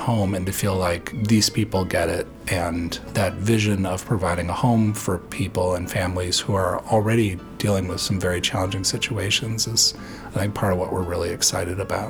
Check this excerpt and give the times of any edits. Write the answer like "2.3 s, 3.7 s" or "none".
1.1 s, 3.0 s